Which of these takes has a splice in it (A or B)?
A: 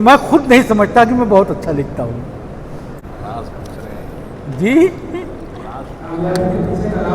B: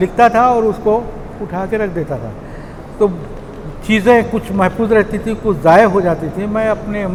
A